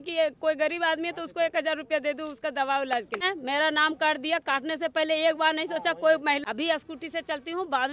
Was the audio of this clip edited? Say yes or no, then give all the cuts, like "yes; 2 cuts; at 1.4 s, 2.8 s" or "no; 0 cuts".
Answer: yes; 2 cuts; at 3.3 s, 6.4 s